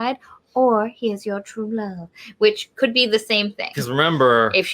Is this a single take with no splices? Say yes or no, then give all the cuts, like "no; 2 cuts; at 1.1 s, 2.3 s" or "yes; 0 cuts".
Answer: no; 1 cut; at 3.7 s